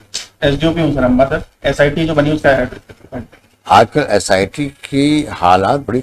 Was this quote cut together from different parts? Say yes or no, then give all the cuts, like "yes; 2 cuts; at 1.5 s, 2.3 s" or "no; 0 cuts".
no; 0 cuts